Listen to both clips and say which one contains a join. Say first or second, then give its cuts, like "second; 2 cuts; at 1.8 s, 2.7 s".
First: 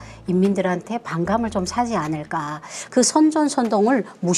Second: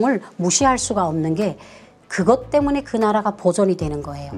first; 1 cut; at 2.8 s